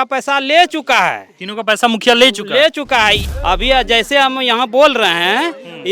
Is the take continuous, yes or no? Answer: no